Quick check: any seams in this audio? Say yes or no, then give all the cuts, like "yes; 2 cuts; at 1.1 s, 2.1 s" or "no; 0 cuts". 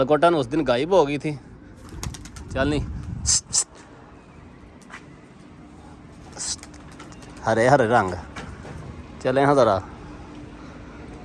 no; 0 cuts